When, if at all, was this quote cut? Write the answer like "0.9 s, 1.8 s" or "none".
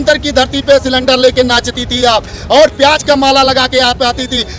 none